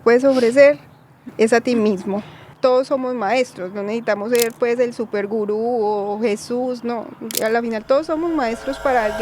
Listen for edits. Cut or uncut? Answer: cut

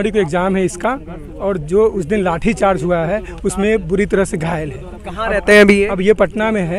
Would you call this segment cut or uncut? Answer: uncut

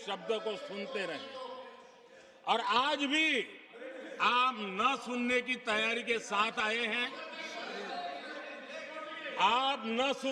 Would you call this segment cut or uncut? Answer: uncut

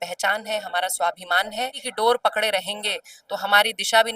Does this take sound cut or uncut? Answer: cut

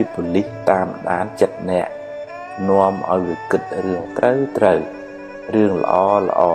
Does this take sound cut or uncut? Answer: uncut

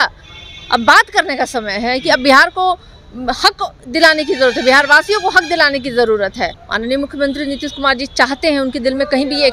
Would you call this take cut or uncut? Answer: cut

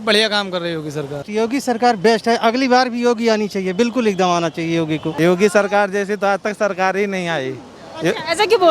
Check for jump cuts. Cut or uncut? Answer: cut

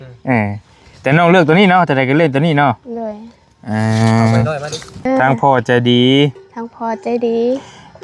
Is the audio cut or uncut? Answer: cut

